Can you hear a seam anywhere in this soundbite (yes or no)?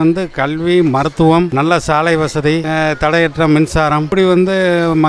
no